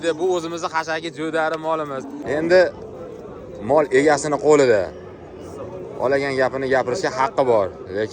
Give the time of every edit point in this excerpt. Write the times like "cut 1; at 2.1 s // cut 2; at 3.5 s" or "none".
cut 1; at 2.2 s